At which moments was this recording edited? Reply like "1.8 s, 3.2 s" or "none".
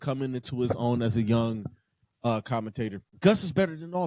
3.1 s